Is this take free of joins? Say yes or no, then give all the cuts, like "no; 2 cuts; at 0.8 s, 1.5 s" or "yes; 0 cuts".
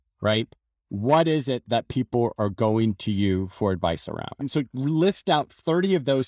no; 1 cut; at 4.4 s